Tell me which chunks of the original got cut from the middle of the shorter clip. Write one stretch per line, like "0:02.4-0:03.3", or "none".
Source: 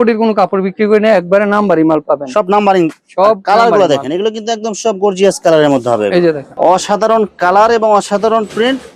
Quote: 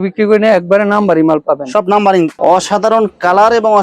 0:02.9-0:06.5

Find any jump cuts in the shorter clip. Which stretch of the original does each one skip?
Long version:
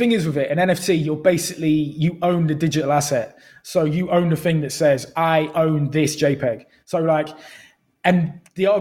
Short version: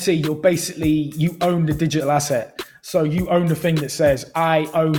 none

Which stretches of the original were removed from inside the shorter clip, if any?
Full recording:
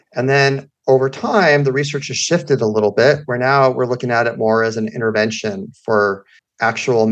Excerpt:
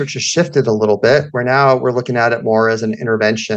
none

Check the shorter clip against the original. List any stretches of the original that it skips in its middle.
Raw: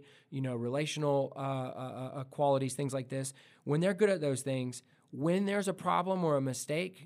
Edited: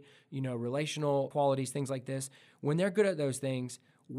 0:01.3-0:02.3

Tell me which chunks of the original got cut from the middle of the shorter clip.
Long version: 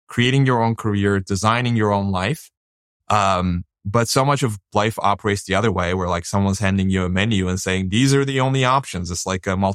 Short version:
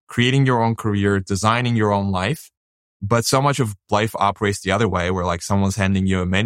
0:02.9-0:03.7

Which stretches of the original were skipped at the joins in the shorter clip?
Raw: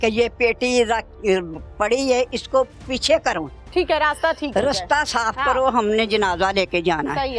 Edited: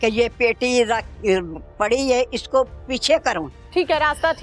none

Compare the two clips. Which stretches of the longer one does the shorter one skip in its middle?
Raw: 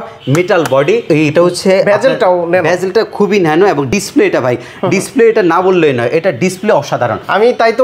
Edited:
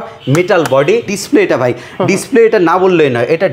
0:01.0-0:03.9

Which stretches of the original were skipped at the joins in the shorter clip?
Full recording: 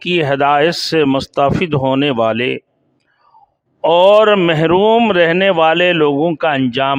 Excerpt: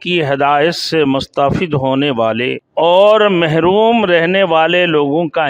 0:02.6-0:03.7

